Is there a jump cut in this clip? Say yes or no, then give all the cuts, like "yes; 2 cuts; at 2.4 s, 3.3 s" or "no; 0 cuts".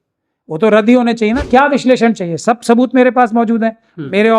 yes; 1 cut; at 1.4 s